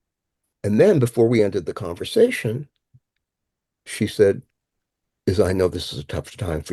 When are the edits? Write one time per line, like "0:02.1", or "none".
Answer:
none